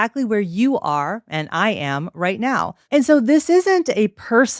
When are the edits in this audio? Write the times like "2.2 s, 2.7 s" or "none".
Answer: 2.8 s